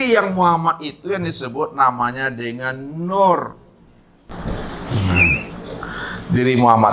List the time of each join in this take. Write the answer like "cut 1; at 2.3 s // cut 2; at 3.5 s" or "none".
cut 1; at 4.3 s